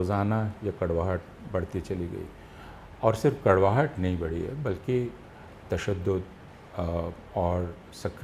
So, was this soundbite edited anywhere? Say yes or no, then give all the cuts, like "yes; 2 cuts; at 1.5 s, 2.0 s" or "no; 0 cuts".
no; 0 cuts